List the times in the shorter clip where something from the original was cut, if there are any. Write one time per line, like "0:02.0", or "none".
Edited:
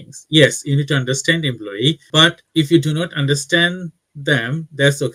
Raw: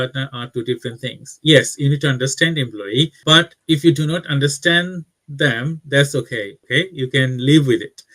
none